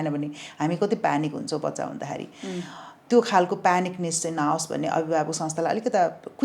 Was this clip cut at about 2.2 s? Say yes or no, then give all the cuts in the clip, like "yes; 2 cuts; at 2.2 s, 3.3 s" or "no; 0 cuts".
no; 0 cuts